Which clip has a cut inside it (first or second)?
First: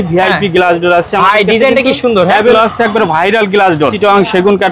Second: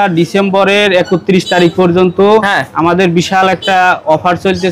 first